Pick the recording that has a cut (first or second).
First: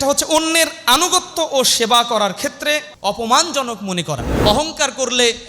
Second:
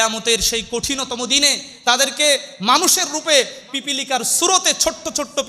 first